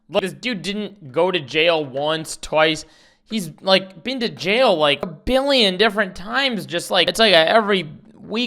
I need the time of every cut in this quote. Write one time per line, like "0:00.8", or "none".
0:07.1